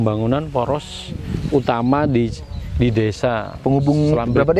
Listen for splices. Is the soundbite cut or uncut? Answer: uncut